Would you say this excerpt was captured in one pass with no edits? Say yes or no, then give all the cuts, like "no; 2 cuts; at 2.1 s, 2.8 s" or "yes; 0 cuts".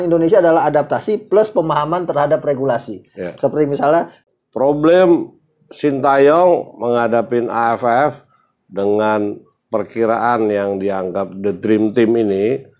no; 1 cut; at 4.2 s